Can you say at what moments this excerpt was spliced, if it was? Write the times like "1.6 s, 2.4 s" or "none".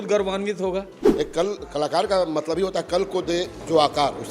1.0 s